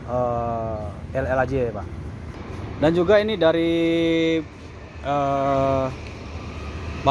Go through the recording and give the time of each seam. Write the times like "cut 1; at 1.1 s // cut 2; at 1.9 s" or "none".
cut 1; at 2.3 s